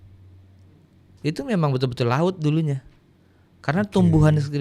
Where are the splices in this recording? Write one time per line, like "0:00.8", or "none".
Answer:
none

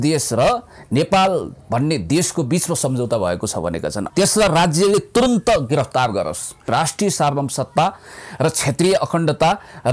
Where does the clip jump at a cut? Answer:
0:04.0
0:06.7

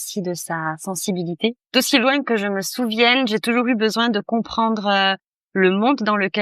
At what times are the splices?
0:01.6

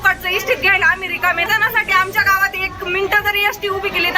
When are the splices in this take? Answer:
0:01.5

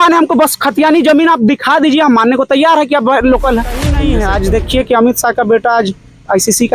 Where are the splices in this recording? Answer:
0:03.9

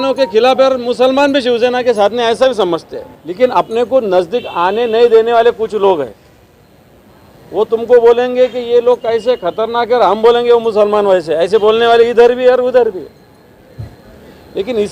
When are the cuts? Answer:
0:03.2

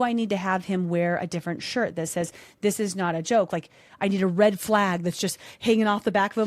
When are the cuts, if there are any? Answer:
0:03.5

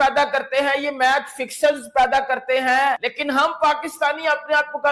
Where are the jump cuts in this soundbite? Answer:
0:03.1

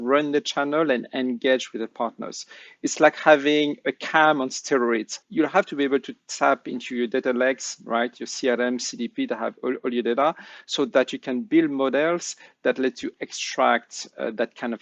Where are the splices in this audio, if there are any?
0:05.2

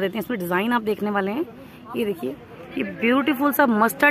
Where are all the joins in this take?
none

